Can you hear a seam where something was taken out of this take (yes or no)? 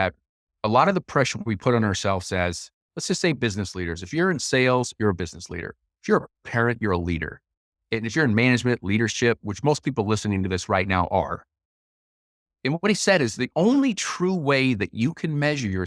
no